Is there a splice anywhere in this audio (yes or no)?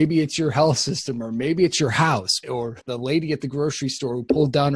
yes